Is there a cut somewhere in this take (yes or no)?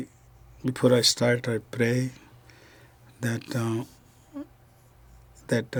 no